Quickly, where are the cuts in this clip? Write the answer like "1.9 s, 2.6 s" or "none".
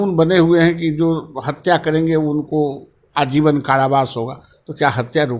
none